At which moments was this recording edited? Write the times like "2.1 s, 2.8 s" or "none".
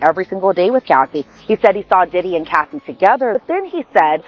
3.4 s